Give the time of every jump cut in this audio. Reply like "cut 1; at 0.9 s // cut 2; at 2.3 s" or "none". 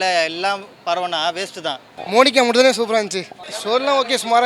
cut 1; at 2.0 s